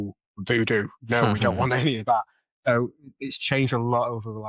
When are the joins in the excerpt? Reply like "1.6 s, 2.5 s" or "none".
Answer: none